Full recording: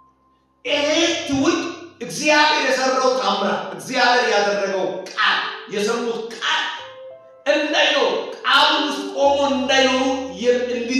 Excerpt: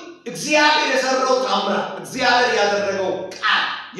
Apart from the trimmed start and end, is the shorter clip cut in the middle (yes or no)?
no